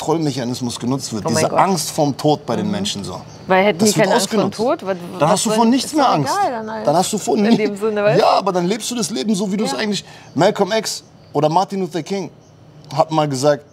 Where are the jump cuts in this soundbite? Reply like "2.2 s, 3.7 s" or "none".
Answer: none